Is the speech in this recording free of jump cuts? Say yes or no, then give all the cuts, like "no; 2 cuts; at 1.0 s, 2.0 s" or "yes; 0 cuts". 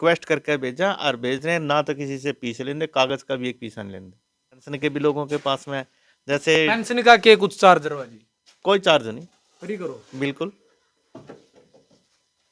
no; 1 cut; at 4.7 s